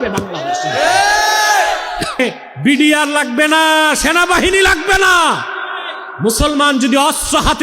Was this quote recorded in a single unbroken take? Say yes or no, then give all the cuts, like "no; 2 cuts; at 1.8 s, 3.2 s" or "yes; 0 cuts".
no; 1 cut; at 2.2 s